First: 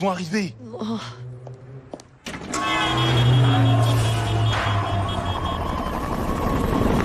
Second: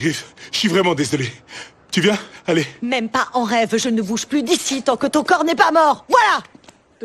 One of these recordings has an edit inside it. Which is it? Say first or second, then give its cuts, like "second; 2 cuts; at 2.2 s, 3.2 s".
second; 2 cuts; at 3.7 s, 6.0 s